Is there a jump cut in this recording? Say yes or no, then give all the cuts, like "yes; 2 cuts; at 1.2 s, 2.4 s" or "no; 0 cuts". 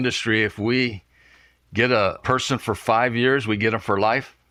no; 0 cuts